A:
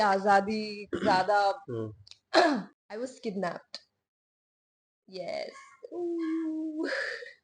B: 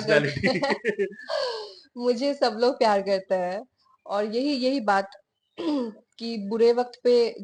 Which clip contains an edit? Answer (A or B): A